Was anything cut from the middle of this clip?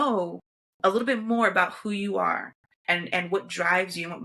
no; 0 cuts

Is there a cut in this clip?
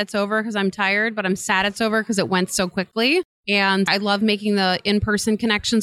no; 0 cuts

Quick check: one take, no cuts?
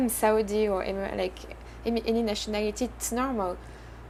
yes; 0 cuts

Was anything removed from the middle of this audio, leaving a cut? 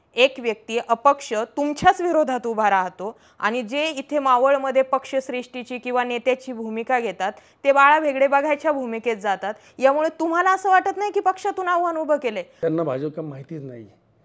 yes; 1 cut; at 12.5 s

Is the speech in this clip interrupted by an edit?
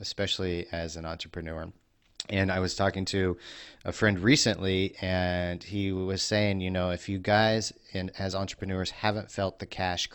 no; 0 cuts

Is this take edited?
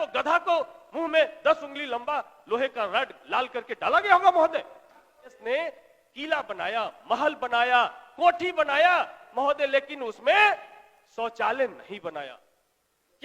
yes; 1 cut; at 5.4 s

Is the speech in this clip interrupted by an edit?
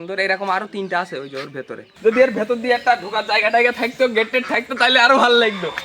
yes; 1 cut; at 1.8 s

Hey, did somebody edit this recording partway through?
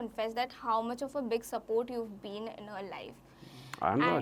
no; 0 cuts

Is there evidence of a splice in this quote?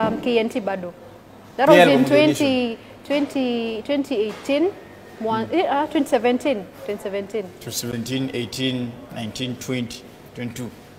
no; 0 cuts

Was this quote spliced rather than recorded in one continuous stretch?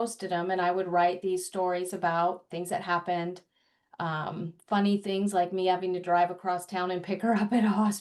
no; 0 cuts

